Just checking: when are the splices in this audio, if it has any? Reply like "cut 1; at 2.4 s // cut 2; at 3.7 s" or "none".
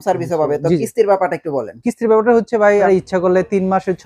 cut 1; at 2.9 s